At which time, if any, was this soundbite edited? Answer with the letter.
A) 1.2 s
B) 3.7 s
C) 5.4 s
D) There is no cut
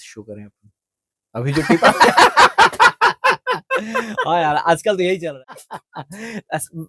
C